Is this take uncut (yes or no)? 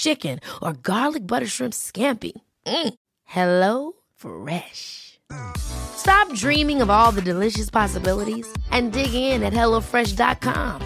yes